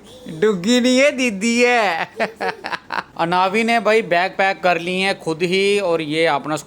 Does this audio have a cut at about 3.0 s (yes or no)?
yes